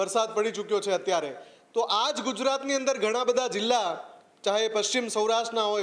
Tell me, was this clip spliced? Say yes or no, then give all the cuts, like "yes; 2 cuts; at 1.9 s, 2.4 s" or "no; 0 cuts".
no; 0 cuts